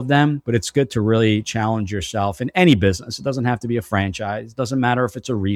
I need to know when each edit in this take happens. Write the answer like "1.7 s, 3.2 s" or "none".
none